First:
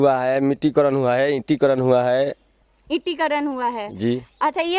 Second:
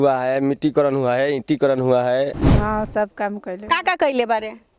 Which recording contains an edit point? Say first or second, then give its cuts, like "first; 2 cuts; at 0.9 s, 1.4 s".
second; 1 cut; at 2.6 s